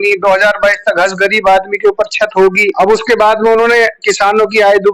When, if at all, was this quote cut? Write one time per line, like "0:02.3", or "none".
0:02.7